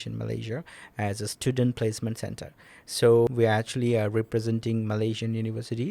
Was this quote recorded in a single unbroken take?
no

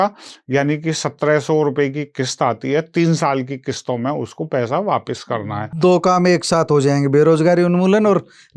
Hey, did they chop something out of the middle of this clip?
no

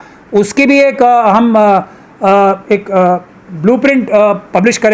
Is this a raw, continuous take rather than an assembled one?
yes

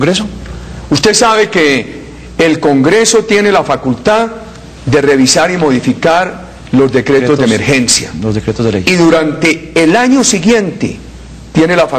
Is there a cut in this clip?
no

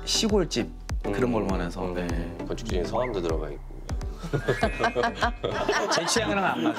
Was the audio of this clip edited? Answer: yes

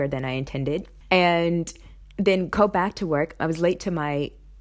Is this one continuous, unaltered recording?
no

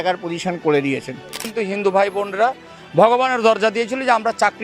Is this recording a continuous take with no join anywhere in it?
no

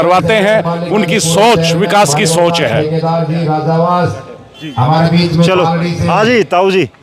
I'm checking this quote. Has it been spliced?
no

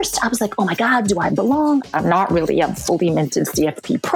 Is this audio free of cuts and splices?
no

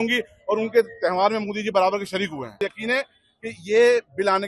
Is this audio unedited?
no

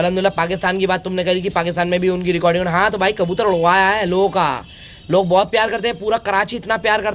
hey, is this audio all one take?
yes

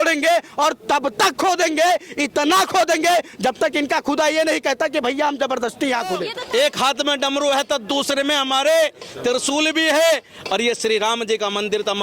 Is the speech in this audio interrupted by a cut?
yes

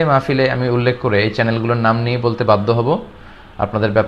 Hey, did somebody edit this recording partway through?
no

